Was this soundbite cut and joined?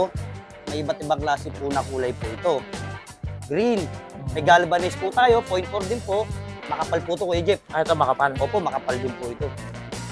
yes; 1 cut; at 2.9 s

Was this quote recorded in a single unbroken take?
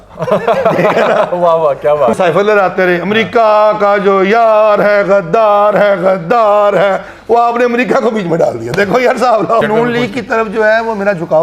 no; 2 cuts; at 2.1 s, 9.7 s

